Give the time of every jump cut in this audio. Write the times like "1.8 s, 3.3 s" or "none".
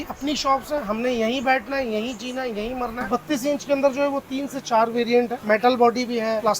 0.8 s, 3.1 s, 5.4 s